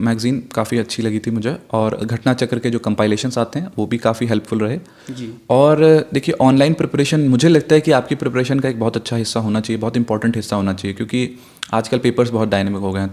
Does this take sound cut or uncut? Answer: uncut